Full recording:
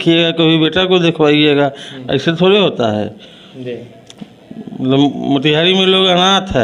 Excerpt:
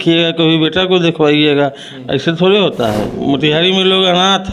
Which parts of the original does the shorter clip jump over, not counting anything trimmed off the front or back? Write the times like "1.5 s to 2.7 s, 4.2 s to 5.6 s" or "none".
3.2 s to 5.2 s